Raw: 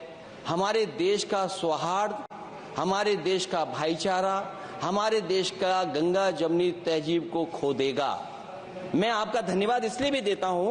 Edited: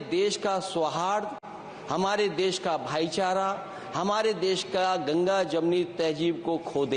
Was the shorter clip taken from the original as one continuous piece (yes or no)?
yes